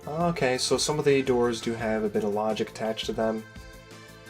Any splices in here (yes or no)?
yes